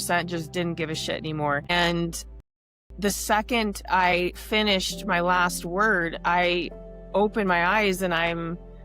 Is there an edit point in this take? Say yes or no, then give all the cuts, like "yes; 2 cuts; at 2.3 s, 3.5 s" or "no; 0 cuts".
yes; 1 cut; at 1.7 s